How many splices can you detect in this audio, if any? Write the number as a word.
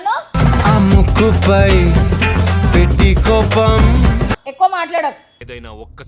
zero